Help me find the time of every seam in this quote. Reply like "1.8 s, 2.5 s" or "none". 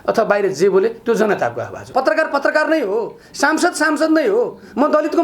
1.9 s